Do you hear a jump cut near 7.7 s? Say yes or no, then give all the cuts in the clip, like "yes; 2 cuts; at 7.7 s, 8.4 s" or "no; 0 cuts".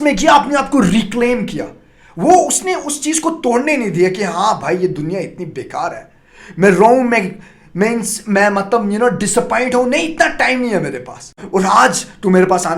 no; 1 cut; at 11.4 s